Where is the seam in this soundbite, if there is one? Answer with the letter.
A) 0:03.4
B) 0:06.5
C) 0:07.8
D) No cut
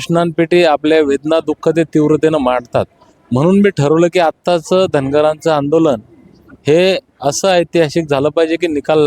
D